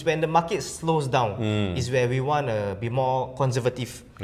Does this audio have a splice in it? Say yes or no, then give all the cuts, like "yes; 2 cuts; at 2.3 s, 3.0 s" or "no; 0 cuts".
no; 0 cuts